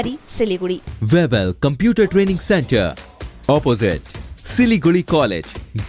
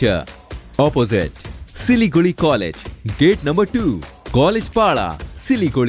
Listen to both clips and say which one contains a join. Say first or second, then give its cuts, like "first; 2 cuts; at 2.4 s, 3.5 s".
first; 1 cut; at 0.9 s